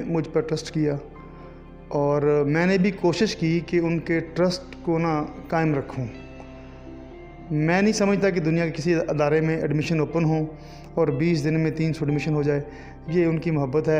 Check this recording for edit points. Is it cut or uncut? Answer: uncut